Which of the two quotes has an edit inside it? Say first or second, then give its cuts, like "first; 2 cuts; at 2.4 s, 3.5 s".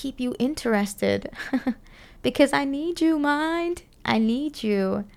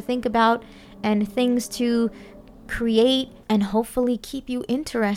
second; 1 cut; at 3.4 s